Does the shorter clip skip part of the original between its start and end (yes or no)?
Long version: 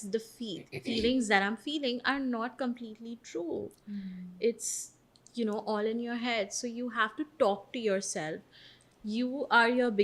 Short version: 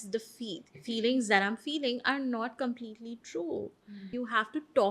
yes